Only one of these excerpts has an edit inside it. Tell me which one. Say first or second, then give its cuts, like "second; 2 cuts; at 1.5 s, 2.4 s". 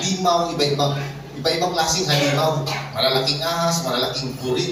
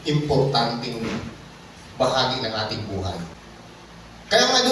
second; 1 cut; at 3.4 s